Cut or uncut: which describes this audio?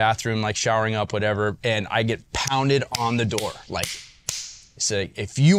cut